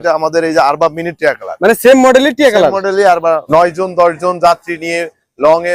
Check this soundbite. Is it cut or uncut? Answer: cut